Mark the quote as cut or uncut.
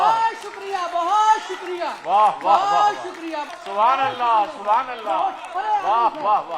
cut